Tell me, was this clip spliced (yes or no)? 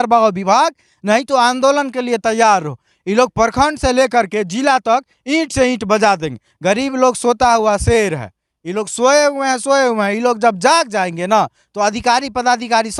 no